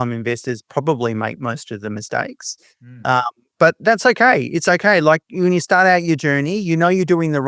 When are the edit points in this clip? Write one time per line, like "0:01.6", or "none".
none